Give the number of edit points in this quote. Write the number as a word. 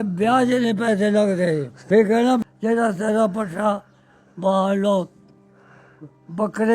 two